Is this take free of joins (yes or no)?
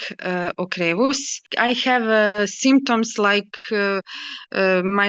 no